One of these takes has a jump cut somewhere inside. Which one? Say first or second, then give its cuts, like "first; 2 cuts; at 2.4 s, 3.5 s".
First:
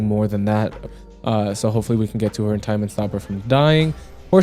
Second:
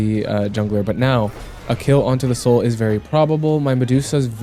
first; 1 cut; at 1.0 s